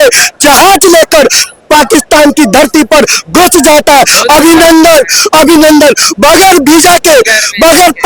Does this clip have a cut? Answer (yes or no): no